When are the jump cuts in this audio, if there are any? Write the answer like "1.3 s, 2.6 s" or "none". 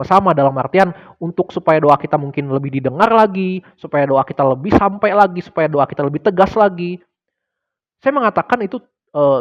none